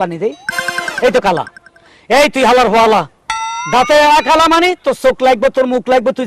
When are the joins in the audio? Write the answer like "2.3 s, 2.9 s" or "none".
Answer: none